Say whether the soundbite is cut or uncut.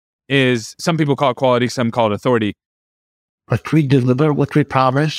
cut